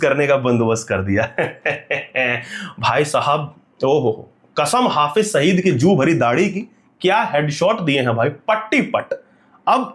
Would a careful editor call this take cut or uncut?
uncut